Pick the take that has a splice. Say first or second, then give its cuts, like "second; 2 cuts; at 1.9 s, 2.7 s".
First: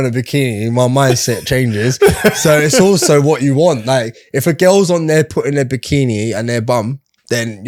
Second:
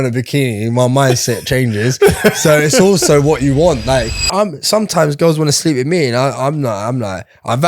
second; 1 cut; at 4.3 s